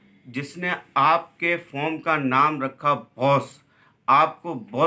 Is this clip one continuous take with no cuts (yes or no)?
yes